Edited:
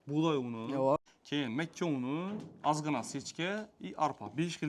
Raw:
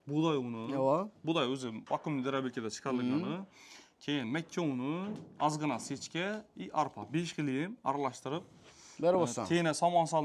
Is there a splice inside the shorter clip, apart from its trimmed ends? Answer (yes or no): yes